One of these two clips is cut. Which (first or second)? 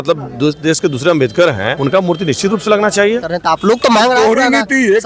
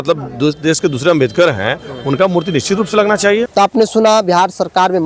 first